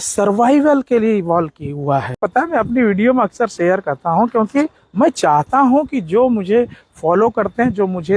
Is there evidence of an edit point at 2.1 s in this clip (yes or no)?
yes